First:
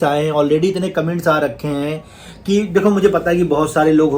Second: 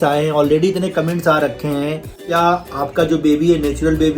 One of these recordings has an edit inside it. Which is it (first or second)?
second